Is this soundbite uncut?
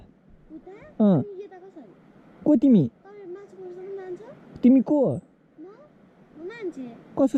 yes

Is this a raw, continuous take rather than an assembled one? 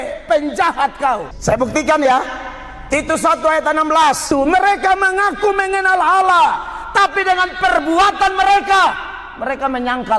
no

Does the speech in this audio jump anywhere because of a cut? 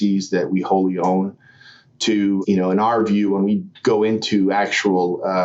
yes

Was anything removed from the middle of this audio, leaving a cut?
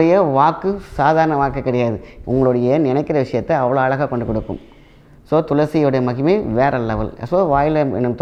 no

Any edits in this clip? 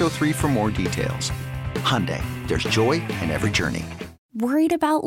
yes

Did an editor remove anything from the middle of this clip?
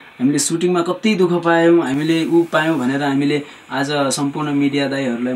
no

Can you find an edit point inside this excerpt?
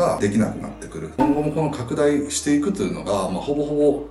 yes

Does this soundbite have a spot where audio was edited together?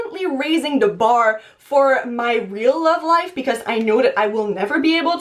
no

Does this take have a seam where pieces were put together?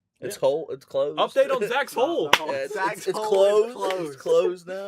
no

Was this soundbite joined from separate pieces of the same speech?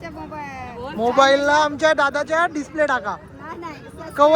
no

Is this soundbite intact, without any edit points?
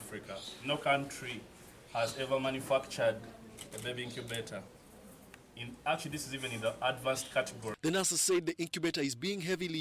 no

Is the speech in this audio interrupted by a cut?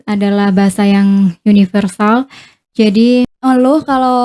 yes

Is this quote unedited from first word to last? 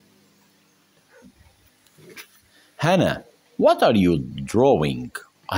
no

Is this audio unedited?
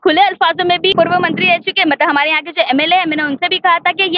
no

